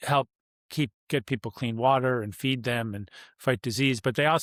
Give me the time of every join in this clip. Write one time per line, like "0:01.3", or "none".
none